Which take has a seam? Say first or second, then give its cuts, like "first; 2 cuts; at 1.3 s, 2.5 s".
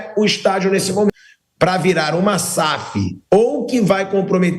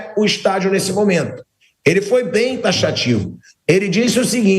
first; 1 cut; at 1.1 s